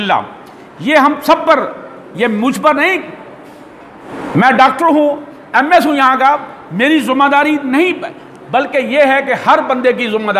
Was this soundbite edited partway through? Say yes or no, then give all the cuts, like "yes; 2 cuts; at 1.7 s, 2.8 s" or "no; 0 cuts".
no; 0 cuts